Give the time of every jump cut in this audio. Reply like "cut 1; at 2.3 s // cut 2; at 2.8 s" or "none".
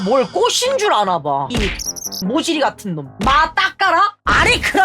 cut 1; at 1.5 s // cut 2; at 3.2 s